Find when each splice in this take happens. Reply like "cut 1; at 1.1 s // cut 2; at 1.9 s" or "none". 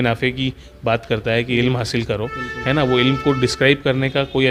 none